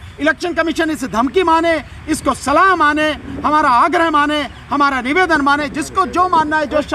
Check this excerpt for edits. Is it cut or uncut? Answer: uncut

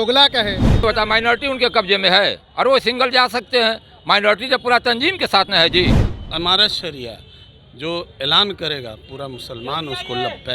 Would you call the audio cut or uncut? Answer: cut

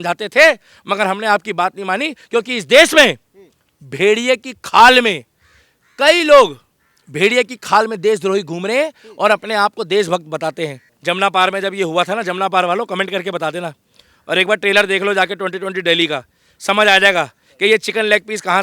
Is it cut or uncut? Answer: cut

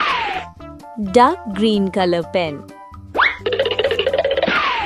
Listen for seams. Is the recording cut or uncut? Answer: cut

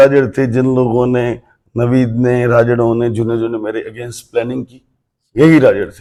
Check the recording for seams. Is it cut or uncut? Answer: uncut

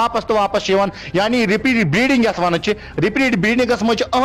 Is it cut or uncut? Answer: uncut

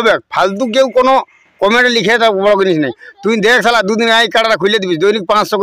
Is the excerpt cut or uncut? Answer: uncut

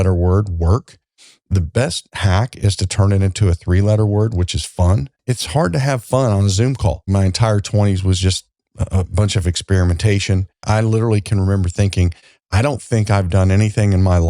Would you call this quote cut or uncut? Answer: cut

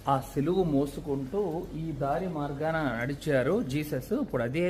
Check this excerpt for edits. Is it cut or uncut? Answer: uncut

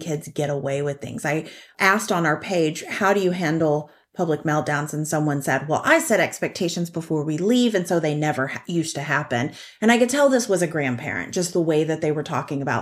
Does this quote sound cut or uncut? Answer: cut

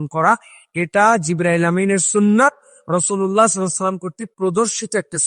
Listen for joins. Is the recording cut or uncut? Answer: uncut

